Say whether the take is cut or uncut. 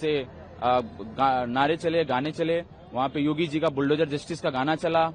uncut